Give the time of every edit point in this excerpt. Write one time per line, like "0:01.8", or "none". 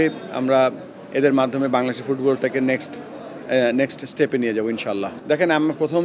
0:05.1